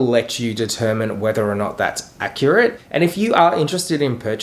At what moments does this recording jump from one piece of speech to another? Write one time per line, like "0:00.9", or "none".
0:02.8